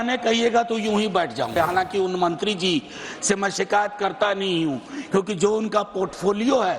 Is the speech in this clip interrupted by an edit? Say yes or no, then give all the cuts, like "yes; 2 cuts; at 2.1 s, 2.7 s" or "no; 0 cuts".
yes; 1 cut; at 1.5 s